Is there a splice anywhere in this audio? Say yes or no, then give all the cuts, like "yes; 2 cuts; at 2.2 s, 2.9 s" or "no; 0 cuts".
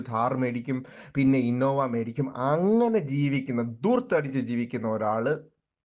no; 0 cuts